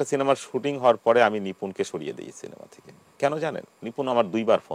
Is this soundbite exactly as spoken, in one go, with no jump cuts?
no; 1 cut; at 3.7 s

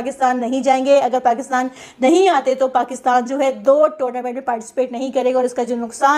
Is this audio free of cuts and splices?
yes; 0 cuts

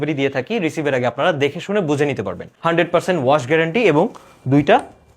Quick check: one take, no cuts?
no; 1 cut; at 2.5 s

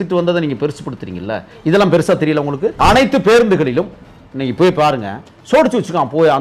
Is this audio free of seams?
no; 1 cut; at 2.8 s

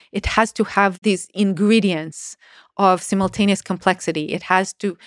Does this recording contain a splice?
yes; 1 cut; at 1.0 s

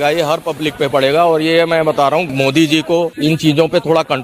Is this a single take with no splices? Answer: no; 2 cuts; at 2.3 s, 3.1 s

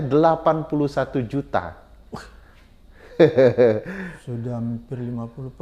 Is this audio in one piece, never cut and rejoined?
yes; 0 cuts

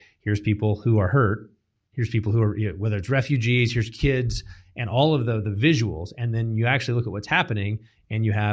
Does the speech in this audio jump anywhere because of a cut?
no; 0 cuts

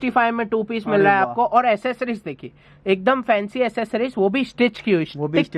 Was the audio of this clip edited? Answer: no; 0 cuts

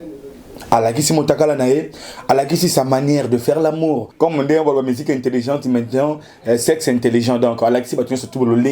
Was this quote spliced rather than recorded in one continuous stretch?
yes; 1 cut; at 4.1 s

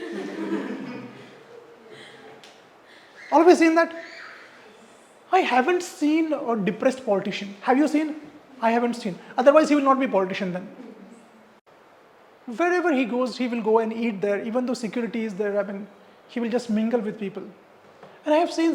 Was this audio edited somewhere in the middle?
yes; 1 cut; at 11.7 s

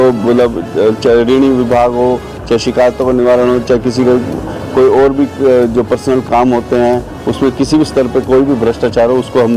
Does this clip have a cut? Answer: no; 0 cuts

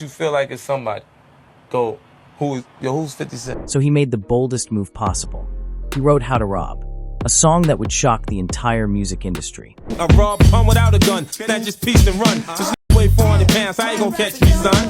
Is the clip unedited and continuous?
yes; 0 cuts

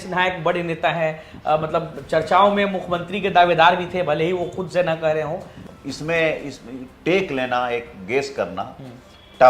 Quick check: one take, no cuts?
no; 1 cut; at 5.6 s

